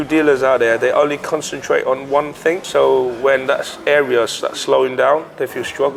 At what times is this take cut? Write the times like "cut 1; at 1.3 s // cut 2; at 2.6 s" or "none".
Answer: none